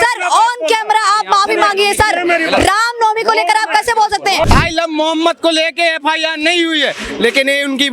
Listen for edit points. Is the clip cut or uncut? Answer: cut